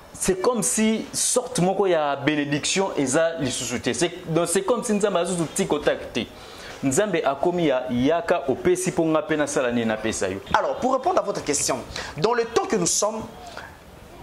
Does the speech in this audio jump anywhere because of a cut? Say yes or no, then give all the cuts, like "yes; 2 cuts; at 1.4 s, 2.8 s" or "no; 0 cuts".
yes; 1 cut; at 10.4 s